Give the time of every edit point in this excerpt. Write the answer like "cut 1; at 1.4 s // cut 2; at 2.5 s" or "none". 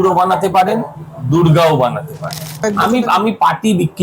cut 1; at 2.6 s